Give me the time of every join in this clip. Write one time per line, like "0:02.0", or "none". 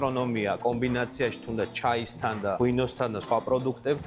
none